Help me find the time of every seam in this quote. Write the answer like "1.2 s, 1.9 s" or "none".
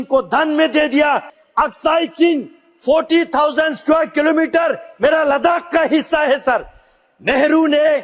1.3 s